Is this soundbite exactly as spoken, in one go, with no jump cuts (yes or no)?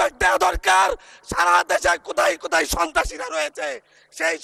yes